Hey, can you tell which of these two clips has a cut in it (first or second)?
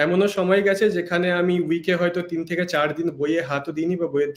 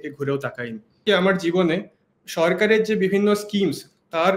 second